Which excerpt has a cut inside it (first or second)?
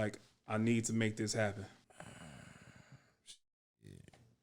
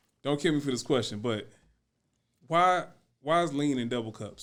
first